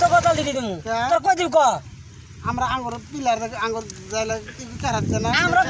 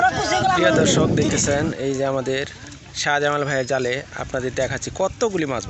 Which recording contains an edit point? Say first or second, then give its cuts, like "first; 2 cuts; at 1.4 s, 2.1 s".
second; 1 cut; at 1.4 s